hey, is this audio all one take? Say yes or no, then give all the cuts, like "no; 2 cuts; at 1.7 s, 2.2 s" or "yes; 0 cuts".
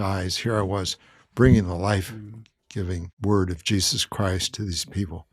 no; 1 cut; at 3.1 s